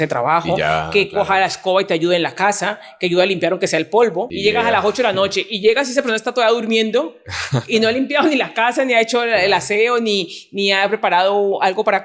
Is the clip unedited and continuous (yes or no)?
no